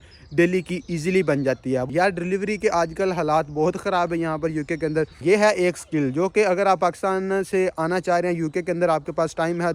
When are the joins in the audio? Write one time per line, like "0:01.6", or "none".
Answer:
0:01.8
0:05.2